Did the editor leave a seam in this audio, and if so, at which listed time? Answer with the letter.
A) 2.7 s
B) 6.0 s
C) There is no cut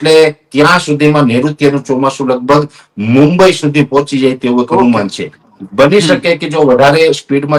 C